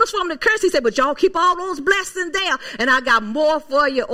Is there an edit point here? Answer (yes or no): no